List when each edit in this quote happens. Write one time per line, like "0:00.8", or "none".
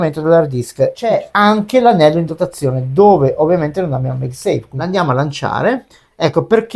0:01.1
0:04.7